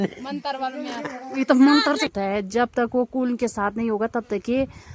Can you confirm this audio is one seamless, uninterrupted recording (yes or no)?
no